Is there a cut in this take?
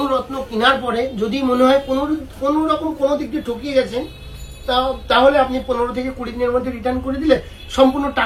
no; 0 cuts

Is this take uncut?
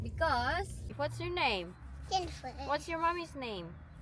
no; 1 cut; at 0.9 s

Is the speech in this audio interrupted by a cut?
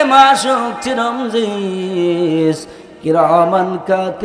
no; 0 cuts

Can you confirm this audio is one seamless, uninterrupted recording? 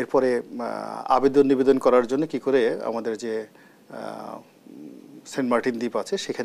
yes; 0 cuts

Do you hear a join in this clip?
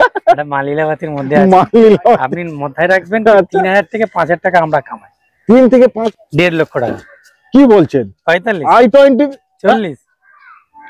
yes; 1 cut; at 6.0 s

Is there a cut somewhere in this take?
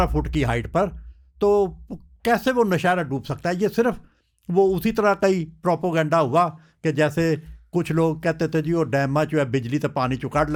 no; 0 cuts

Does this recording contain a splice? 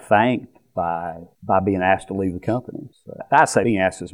no; 0 cuts

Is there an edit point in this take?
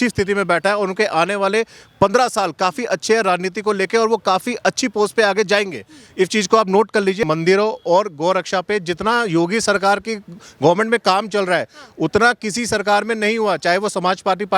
yes; 1 cut; at 7.2 s

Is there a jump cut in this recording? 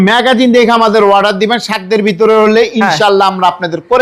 no; 0 cuts

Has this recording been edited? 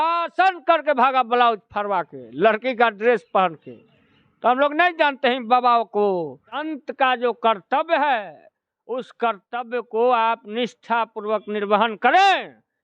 yes; 1 cut; at 6.7 s

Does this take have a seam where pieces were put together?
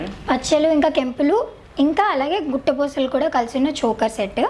no; 0 cuts

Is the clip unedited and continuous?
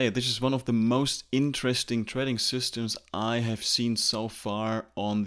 yes; 0 cuts

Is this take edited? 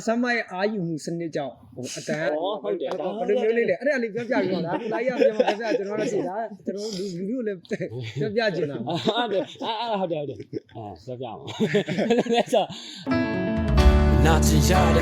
yes; 1 cut; at 12.9 s

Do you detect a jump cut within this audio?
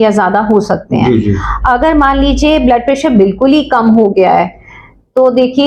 no; 0 cuts

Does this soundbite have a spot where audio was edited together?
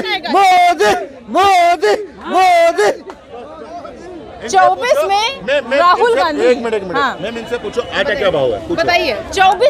no; 0 cuts

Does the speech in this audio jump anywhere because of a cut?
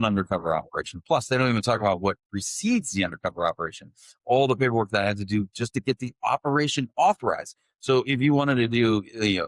no; 0 cuts

